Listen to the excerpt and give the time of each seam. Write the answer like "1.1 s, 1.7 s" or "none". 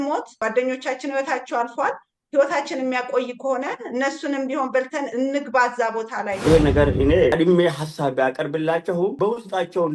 6.4 s, 7.3 s, 9.1 s